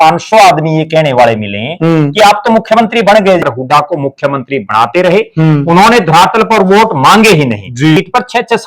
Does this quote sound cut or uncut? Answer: cut